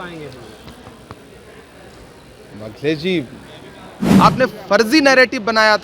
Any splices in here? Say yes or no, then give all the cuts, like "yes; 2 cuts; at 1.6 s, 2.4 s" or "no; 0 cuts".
yes; 1 cut; at 4.0 s